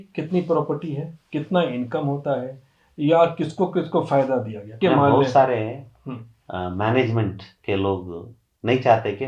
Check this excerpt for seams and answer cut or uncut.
cut